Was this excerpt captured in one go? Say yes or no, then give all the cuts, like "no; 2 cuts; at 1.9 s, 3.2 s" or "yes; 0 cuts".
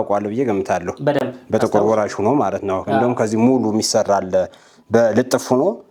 yes; 0 cuts